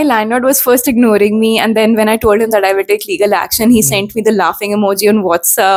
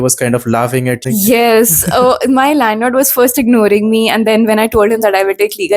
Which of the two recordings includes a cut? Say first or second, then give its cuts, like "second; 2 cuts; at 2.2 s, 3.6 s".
second; 1 cut; at 1.0 s